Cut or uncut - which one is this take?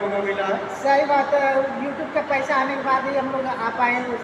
uncut